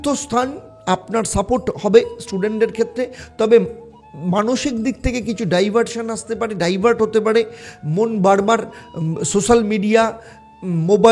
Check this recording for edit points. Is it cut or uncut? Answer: uncut